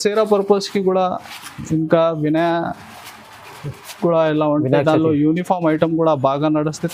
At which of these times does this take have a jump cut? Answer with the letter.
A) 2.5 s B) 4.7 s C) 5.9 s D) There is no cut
D